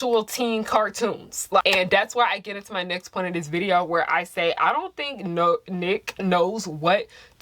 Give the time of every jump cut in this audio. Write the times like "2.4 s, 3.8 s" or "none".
1.6 s